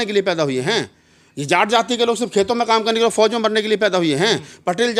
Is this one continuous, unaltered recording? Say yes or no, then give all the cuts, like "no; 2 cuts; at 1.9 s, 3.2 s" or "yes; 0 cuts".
yes; 0 cuts